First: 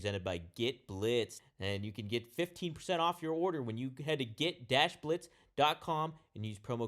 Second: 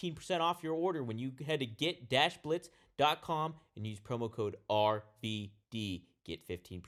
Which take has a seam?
first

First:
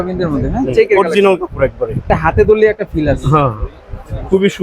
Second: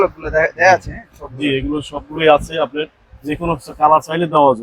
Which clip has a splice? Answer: first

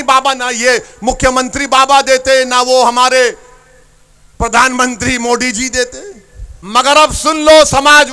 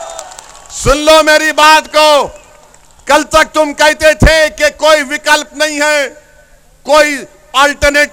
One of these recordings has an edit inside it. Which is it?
first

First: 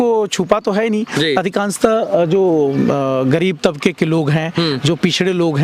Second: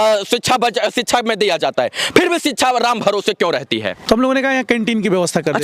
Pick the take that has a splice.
second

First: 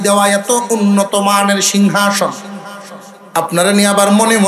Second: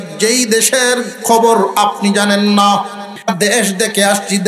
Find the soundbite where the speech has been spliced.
second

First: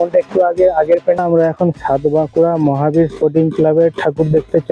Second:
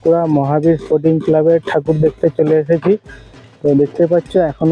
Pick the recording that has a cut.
first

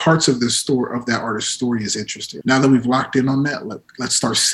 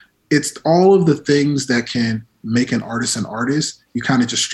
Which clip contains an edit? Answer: first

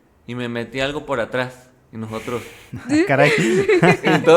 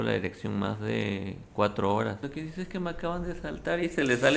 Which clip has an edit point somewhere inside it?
second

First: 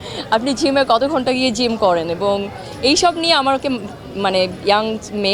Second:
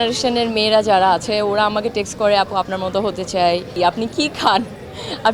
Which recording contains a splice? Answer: second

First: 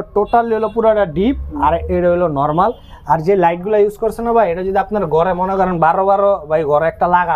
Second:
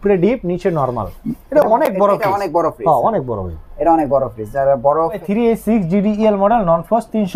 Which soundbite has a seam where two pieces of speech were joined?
second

